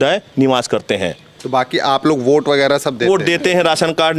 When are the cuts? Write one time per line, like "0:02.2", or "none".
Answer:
none